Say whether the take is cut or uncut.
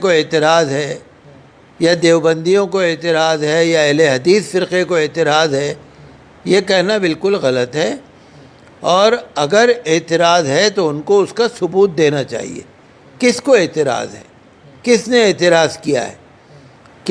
uncut